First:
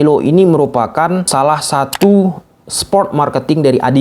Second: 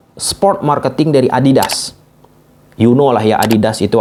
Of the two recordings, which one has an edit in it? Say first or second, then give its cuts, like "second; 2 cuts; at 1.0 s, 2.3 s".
first; 1 cut; at 1.3 s